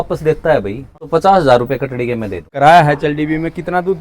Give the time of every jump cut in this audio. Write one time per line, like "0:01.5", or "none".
0:01.0
0:02.5